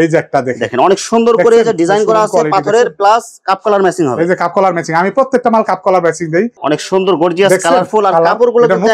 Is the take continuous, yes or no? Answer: no